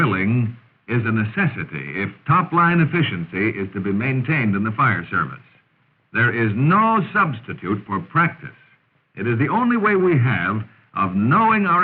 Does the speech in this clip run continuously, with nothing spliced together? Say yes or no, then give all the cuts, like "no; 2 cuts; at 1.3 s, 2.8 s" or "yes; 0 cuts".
no; 1 cut; at 2.8 s